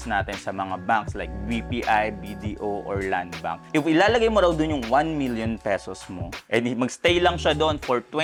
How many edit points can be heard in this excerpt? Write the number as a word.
zero